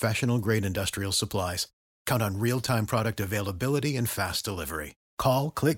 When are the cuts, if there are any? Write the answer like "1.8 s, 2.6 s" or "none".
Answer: none